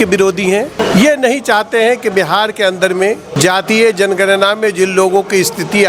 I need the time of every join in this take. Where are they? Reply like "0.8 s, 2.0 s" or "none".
0.8 s, 3.3 s